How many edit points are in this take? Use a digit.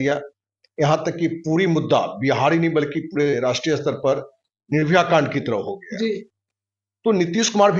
0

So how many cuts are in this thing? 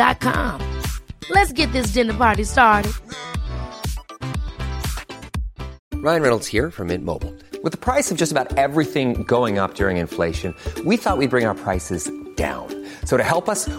1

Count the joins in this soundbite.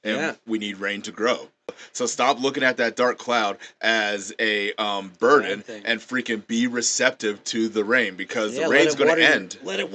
1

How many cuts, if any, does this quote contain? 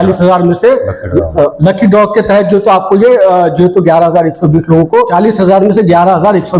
1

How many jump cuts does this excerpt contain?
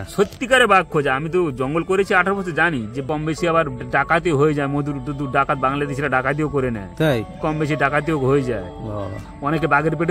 1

